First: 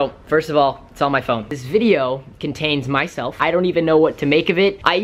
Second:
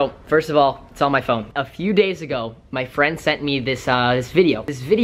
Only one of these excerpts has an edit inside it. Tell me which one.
first; 2 cuts; at 1.5 s, 3.4 s

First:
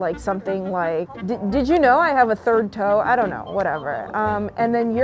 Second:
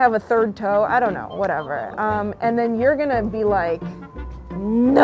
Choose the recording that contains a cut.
first; 1 cut; at 1.2 s

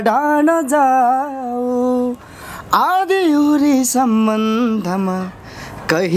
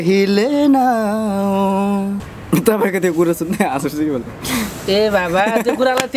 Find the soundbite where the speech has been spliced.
second; 1 cut; at 2.3 s

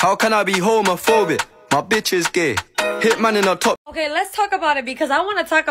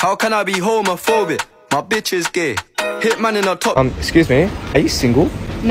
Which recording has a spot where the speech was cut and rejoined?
second; 1 cut; at 3.7 s

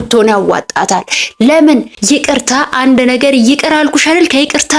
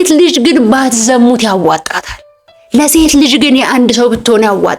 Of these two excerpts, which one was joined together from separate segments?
first; 1 cut; at 1.9 s

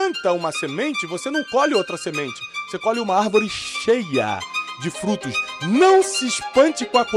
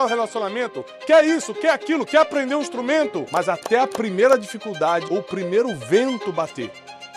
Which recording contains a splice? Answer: second; 2 cuts; at 3.3 s, 5.0 s

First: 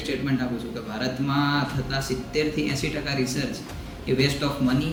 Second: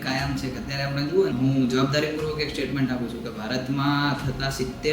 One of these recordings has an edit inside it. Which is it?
second; 1 cut; at 1.3 s

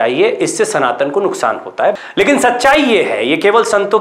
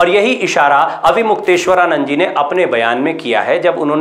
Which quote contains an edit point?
first; 1 cut; at 1.9 s

